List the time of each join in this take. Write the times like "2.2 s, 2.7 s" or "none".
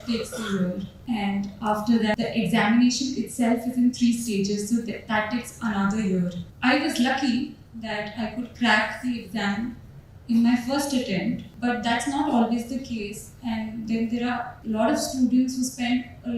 0.9 s, 2.2 s, 6.4 s, 11.5 s, 14.5 s